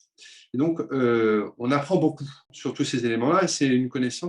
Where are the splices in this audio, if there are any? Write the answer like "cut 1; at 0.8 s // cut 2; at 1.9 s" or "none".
cut 1; at 2.5 s